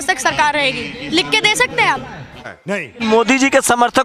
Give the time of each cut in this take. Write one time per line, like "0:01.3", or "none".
0:02.9